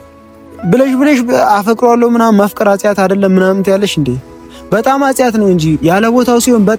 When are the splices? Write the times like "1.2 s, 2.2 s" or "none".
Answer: none